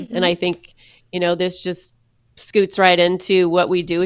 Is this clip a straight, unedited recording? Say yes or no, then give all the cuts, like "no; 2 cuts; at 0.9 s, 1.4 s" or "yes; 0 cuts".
yes; 0 cuts